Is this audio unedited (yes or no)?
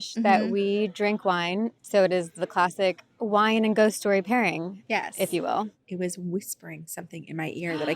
no